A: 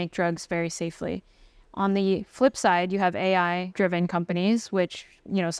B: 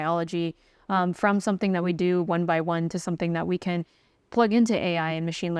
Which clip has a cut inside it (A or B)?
A